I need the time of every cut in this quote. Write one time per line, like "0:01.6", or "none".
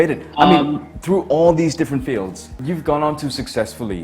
0:02.6